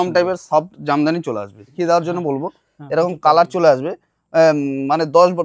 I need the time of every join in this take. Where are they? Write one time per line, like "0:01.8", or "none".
0:01.7